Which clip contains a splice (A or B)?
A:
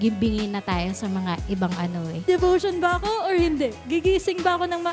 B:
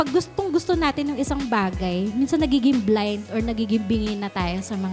A